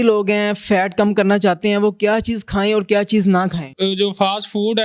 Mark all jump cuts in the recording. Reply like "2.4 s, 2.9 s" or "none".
3.7 s